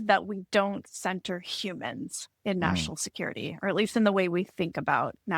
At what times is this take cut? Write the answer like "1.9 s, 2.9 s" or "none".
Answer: none